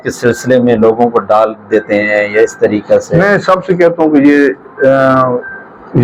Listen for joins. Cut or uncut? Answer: uncut